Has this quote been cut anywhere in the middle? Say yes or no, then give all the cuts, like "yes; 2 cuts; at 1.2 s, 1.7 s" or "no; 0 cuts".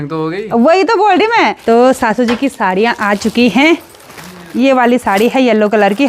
yes; 1 cut; at 1.6 s